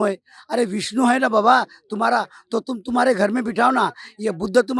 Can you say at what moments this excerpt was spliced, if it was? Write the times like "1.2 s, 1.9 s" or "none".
none